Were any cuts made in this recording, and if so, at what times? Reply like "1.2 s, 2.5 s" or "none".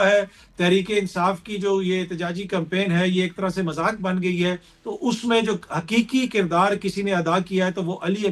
none